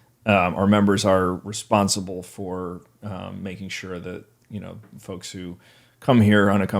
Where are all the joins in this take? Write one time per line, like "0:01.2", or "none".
none